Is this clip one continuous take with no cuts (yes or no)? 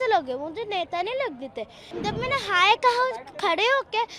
no